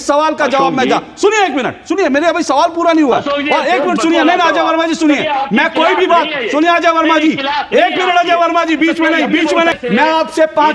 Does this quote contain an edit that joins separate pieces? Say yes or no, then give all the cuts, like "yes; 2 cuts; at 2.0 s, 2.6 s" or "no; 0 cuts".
yes; 1 cut; at 9.8 s